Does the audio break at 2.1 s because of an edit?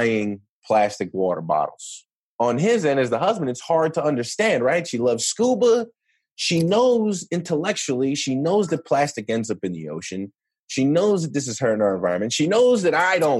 yes; 1 cut; at 2.1 s

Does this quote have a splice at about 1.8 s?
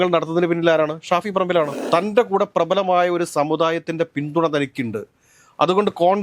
yes; 1 cut; at 1.8 s

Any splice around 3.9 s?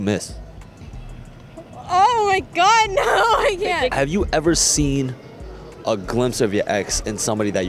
yes; 1 cut; at 3.9 s

